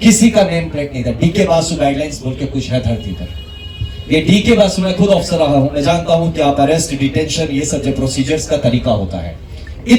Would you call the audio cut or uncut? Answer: uncut